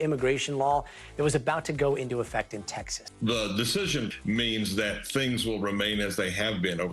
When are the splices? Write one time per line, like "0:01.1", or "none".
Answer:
none